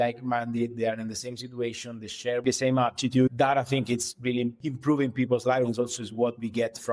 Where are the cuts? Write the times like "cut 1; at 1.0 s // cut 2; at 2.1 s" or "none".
cut 1; at 2.4 s // cut 2; at 4.6 s